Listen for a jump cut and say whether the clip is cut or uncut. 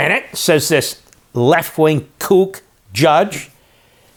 uncut